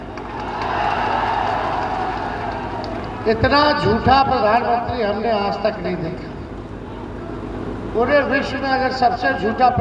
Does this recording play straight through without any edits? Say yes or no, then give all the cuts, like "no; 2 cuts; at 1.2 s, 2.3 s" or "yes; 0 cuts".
yes; 0 cuts